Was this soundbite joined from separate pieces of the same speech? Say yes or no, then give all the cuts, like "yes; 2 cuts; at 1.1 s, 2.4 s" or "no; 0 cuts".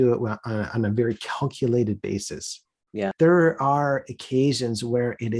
yes; 1 cut; at 3.1 s